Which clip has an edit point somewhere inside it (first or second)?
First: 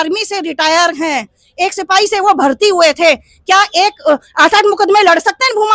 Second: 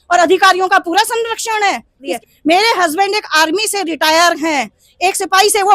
second